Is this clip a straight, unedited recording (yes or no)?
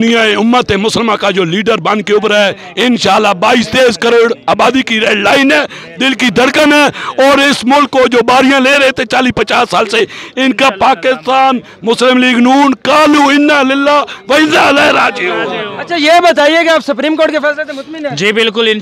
yes